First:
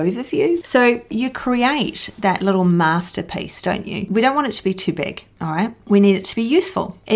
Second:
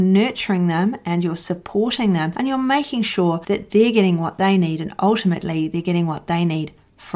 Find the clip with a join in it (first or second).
first